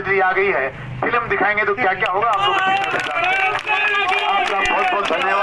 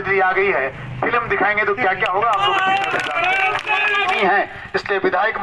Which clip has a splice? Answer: second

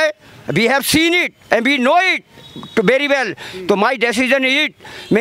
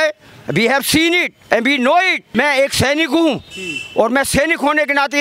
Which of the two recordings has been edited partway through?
second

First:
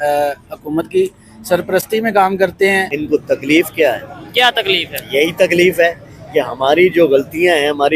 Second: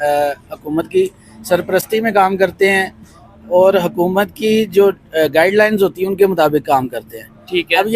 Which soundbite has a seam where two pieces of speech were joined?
first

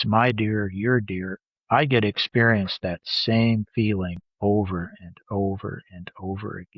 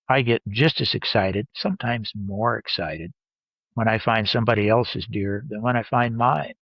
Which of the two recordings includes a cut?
first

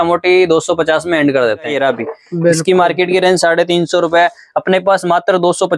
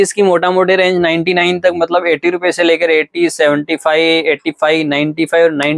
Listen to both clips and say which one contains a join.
first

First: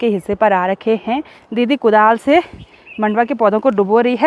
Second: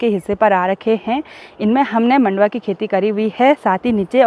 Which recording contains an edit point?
first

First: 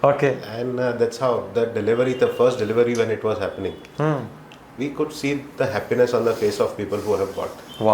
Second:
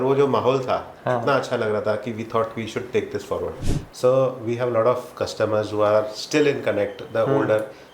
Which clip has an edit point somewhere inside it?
second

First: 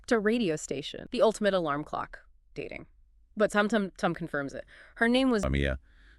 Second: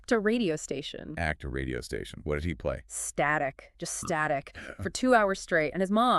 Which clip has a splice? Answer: first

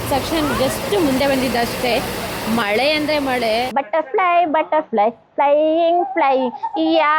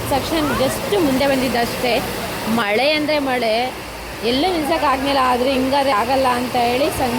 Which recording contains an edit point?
first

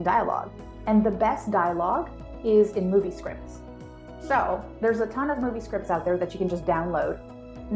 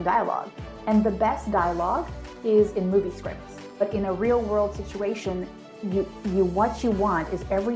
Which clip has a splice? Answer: second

